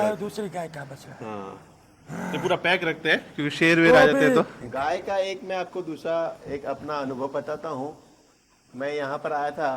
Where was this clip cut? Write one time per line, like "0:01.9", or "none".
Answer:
0:04.6